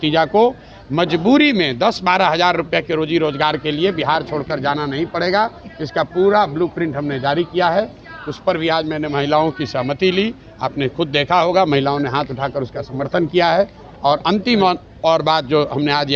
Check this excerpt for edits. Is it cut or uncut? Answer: uncut